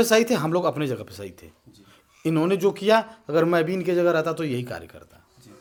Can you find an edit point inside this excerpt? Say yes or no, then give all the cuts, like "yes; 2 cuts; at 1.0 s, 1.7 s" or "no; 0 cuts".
no; 0 cuts